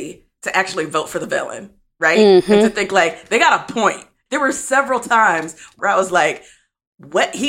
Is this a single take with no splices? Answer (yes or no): no